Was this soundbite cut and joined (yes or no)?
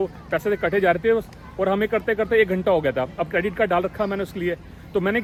no